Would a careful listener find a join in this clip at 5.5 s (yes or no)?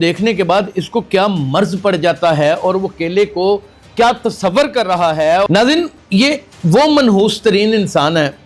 yes